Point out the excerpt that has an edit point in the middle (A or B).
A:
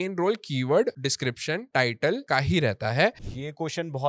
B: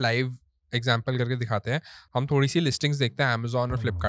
A